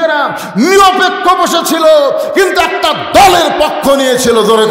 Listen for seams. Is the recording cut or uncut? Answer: uncut